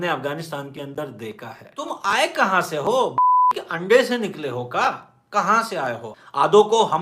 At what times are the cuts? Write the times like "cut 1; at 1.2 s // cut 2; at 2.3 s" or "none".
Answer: cut 1; at 1.9 s